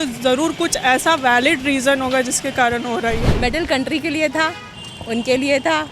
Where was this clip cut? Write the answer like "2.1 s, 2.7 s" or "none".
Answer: 3.3 s